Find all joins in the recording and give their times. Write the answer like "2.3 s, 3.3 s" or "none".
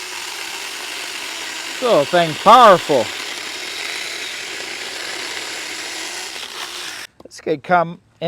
7.1 s